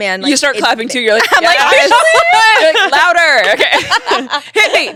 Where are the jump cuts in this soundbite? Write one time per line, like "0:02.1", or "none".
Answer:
none

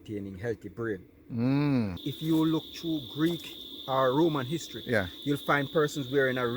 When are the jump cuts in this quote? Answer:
0:02.1

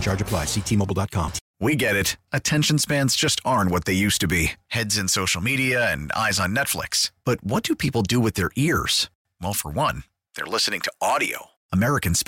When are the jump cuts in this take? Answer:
0:01.5

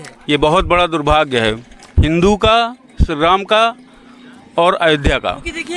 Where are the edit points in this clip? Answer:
none

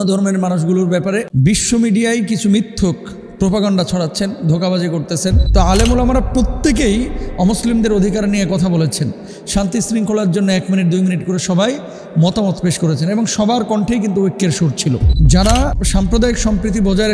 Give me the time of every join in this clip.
0:01.3
0:05.4
0:15.1

